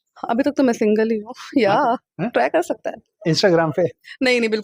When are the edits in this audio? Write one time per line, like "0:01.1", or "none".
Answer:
none